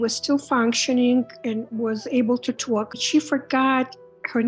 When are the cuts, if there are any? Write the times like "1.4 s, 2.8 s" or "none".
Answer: 3.0 s